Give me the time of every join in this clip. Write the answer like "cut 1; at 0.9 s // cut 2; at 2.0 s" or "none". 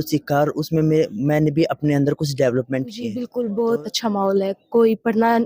cut 1; at 3.2 s